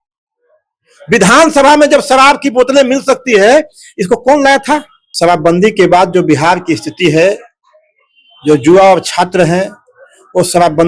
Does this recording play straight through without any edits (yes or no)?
no